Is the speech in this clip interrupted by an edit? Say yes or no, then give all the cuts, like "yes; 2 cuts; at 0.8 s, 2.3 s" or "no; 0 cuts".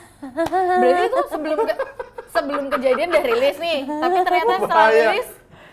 no; 0 cuts